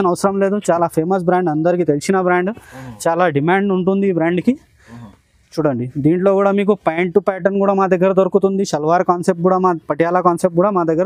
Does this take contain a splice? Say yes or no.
no